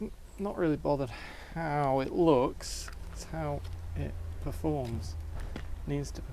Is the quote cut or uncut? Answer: uncut